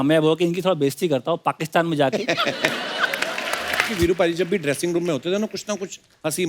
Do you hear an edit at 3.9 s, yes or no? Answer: yes